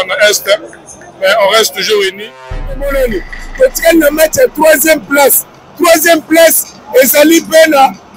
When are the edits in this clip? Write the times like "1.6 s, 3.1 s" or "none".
2.8 s